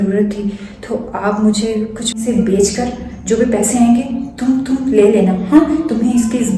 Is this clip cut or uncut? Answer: cut